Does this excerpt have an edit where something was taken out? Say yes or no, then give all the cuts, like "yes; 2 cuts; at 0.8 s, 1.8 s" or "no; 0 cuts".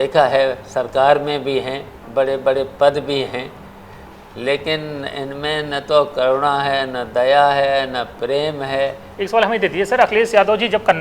yes; 1 cut; at 9.1 s